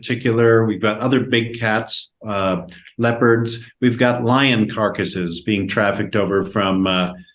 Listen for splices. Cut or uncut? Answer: uncut